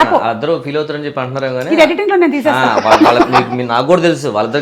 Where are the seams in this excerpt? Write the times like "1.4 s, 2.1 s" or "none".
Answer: none

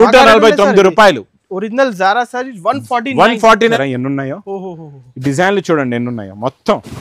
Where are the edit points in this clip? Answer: 3.7 s

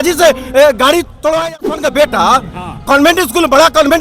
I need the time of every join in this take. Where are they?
1.5 s

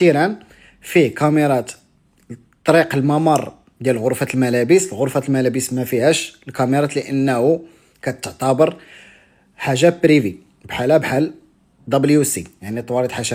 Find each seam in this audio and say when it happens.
none

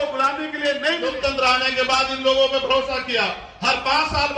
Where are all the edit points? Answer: 1.2 s

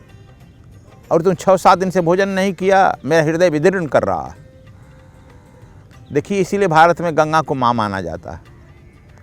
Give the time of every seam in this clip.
none

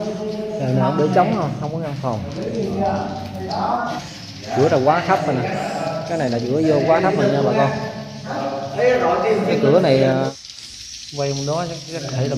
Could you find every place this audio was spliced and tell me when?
4.0 s, 10.3 s

